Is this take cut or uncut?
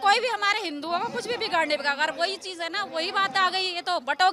uncut